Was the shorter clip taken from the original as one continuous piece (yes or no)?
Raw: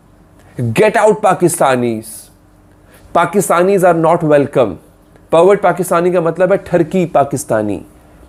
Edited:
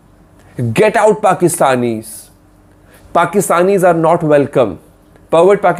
yes